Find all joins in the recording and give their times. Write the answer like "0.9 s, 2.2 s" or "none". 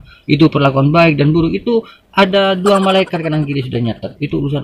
none